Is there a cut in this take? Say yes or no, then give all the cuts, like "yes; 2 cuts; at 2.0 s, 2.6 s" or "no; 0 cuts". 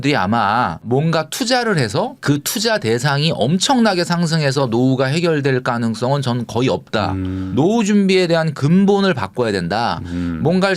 yes; 2 cuts; at 0.8 s, 7.4 s